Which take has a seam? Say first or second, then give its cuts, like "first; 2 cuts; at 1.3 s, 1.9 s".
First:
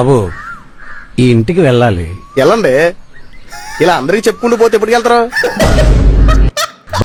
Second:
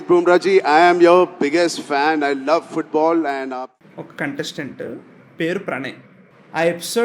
second; 1 cut; at 3.5 s